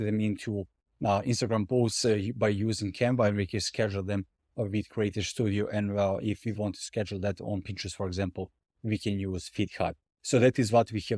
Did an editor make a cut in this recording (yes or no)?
no